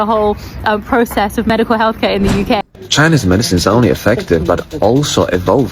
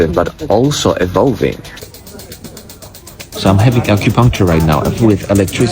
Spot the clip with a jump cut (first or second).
first